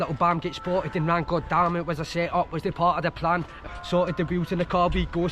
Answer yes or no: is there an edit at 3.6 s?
yes